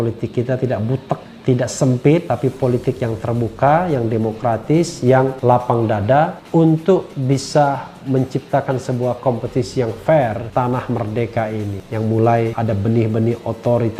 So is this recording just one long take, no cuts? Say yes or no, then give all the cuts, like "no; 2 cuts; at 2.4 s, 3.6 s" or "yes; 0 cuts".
no; 3 cuts; at 1.3 s, 11.8 s, 12.6 s